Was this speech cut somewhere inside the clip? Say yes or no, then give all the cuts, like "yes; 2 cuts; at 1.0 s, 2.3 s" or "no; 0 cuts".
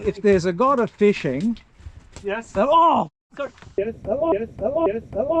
yes; 1 cut; at 3.6 s